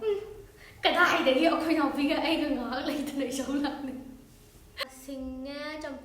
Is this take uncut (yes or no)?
no